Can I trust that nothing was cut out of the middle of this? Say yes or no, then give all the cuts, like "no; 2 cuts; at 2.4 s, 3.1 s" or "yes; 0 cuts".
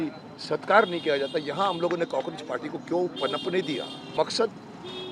no; 1 cut; at 4.1 s